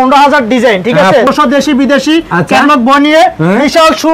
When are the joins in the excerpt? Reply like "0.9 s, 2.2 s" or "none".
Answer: 1.3 s